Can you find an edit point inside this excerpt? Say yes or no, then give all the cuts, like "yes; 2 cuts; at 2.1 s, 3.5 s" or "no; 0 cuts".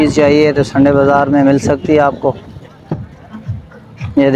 no; 0 cuts